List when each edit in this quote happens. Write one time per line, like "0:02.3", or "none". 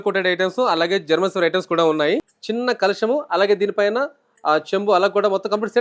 0:02.4

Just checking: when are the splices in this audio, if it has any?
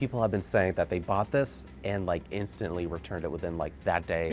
none

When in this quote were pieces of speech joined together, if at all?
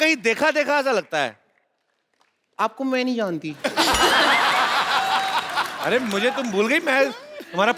none

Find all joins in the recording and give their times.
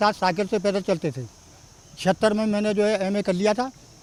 none

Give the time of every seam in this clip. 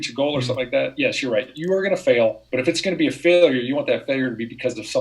0:02.4

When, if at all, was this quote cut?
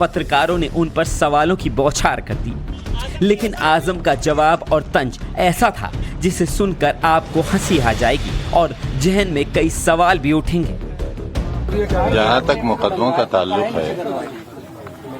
0:03.4

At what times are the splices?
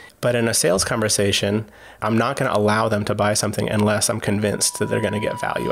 0:01.9

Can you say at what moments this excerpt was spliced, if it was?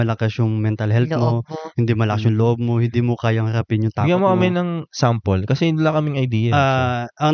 none

